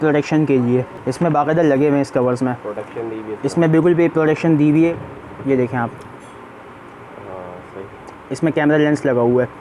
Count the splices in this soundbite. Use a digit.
2